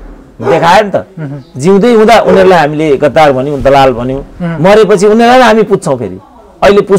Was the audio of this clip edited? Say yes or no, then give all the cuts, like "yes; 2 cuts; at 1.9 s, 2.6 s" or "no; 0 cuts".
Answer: no; 0 cuts